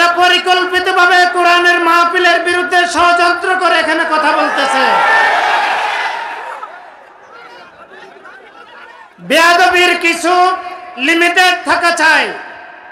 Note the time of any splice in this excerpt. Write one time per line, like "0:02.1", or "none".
none